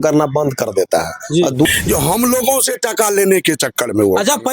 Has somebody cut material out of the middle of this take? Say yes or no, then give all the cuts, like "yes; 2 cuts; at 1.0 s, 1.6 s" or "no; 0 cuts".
yes; 1 cut; at 1.7 s